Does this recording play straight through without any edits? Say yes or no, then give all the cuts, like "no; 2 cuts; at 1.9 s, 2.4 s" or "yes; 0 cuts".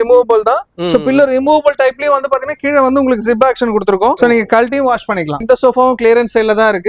no; 2 cuts; at 4.2 s, 5.4 s